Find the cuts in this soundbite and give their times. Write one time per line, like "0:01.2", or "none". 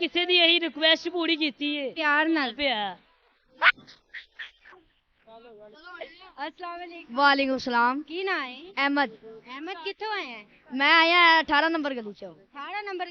0:01.9